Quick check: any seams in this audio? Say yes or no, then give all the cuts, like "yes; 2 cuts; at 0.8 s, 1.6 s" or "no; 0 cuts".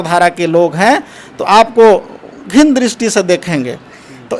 no; 0 cuts